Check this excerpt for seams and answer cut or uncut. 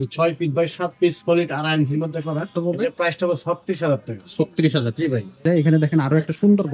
cut